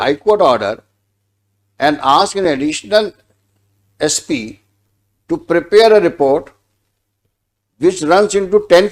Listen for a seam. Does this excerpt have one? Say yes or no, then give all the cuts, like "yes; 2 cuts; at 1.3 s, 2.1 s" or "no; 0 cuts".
no; 0 cuts